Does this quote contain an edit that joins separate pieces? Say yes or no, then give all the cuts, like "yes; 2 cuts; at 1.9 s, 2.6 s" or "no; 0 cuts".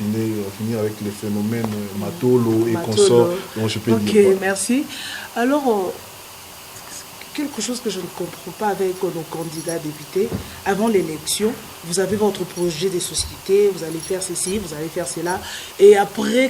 no; 0 cuts